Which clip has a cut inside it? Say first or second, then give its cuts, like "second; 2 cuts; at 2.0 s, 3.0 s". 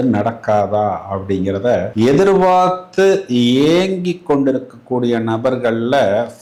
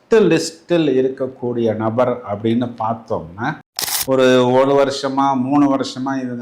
second; 1 cut; at 3.7 s